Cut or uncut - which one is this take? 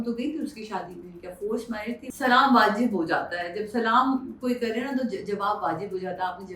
cut